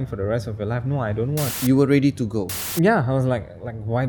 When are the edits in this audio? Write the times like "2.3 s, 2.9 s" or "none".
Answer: 1.5 s, 2.6 s